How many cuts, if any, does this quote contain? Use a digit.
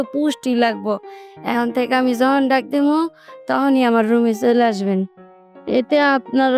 1